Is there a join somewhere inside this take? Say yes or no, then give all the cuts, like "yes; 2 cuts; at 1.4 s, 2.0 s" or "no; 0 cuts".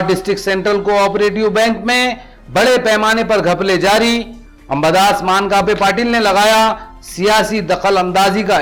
no; 0 cuts